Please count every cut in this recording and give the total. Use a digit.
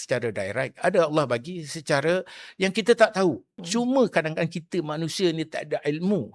1